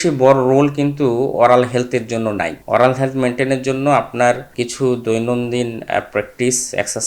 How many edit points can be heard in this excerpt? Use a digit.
2